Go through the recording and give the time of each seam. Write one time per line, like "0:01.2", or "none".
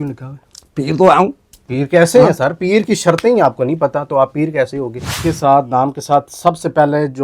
0:05.2